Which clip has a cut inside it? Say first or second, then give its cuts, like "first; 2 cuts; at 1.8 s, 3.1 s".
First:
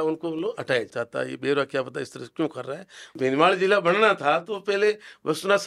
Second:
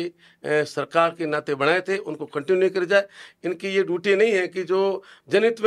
first; 2 cuts; at 0.9 s, 3.1 s